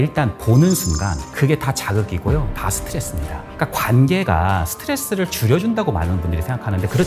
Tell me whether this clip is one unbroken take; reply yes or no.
yes